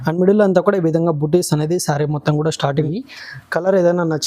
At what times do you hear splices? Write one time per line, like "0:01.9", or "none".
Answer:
0:02.9